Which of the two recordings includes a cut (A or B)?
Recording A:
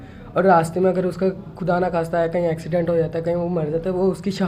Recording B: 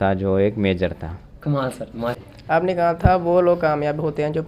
B